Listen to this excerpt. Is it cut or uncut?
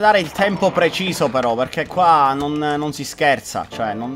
uncut